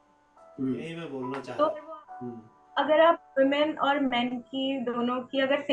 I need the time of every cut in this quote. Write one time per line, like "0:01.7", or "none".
0:01.1